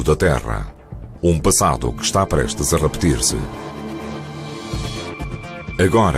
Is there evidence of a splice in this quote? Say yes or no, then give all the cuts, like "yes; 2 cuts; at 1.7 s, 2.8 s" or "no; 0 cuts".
no; 0 cuts